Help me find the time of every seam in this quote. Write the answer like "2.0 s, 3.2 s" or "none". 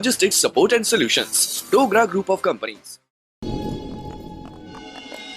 3.2 s